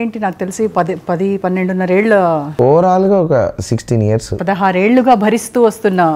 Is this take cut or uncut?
cut